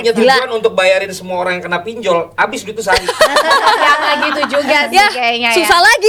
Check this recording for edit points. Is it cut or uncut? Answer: uncut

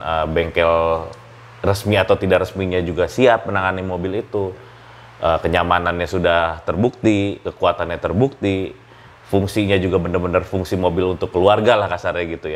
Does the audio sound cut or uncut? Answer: uncut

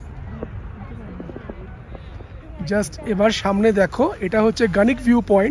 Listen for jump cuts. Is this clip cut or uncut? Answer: uncut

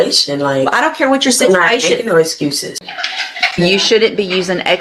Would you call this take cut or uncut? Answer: cut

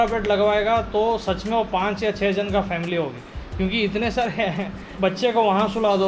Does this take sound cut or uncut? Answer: uncut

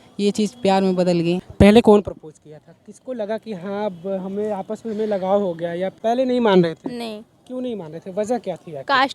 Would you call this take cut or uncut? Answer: cut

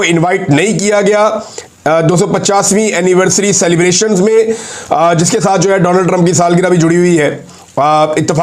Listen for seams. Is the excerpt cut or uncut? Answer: uncut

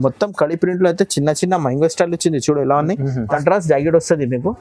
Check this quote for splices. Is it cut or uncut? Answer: cut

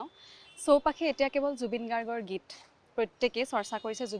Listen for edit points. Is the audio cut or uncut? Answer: uncut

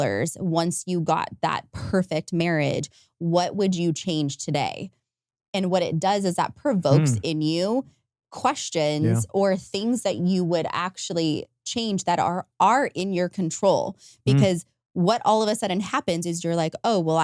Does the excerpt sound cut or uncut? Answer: uncut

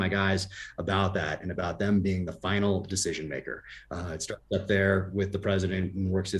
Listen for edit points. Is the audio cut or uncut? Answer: uncut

